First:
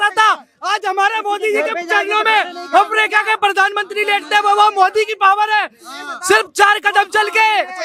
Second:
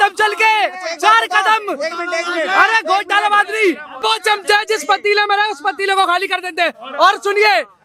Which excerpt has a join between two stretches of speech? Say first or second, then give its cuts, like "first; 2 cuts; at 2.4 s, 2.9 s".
second; 1 cut; at 4.0 s